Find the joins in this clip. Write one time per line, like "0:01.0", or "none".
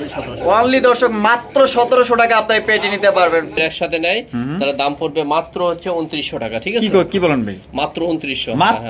0:03.6